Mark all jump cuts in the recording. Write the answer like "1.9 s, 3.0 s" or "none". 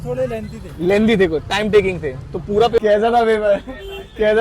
2.8 s